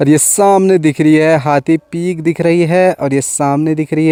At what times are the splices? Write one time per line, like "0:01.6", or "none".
none